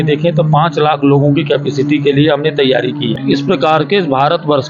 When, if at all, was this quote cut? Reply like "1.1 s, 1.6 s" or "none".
3.2 s